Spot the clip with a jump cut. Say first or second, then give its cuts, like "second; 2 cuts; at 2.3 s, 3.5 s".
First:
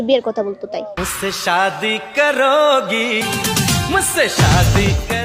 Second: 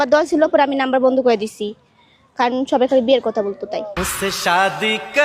first; 1 cut; at 3.2 s